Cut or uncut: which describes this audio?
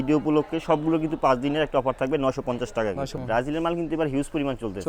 cut